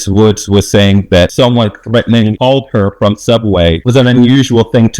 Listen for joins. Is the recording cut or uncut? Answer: cut